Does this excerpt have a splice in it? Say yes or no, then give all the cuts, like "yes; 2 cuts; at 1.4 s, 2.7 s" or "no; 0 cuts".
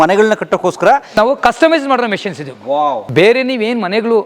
yes; 1 cut; at 3.0 s